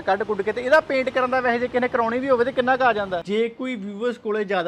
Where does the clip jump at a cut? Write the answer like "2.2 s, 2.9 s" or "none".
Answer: 3.2 s